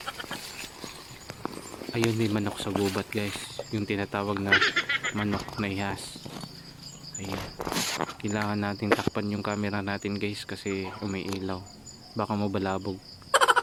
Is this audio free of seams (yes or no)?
yes